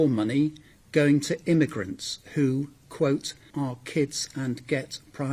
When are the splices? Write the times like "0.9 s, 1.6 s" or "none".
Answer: 3.4 s